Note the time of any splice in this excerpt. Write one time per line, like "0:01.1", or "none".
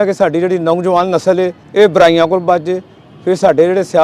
0:01.6